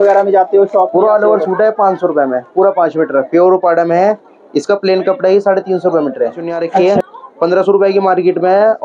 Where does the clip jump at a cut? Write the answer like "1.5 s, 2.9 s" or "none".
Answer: 6.8 s